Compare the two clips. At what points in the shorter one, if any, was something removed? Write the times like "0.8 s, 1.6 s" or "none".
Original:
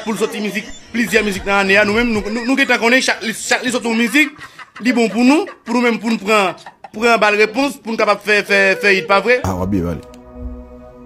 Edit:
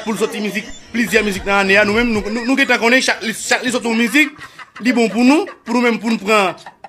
none